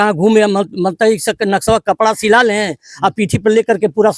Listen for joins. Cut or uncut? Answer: uncut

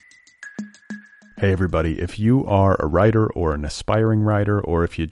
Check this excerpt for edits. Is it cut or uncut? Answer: cut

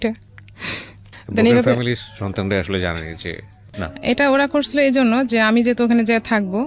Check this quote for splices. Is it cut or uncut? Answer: cut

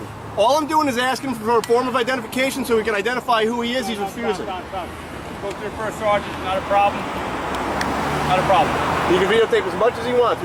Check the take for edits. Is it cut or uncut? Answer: uncut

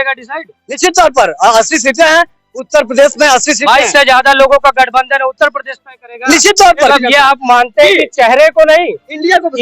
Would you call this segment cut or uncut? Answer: cut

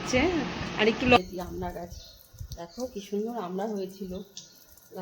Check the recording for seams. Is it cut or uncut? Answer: cut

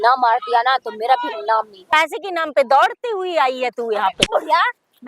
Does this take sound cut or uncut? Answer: cut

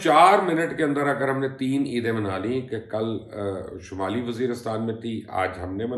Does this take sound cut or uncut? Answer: uncut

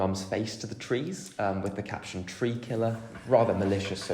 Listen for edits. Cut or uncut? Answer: cut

